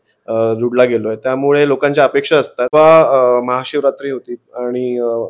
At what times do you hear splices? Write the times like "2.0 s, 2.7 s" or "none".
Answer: 2.7 s